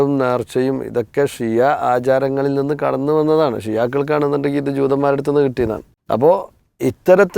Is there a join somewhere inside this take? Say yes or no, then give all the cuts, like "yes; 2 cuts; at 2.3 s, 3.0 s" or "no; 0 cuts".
yes; 1 cut; at 5.9 s